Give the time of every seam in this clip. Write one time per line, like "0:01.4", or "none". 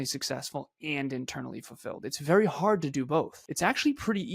0:03.4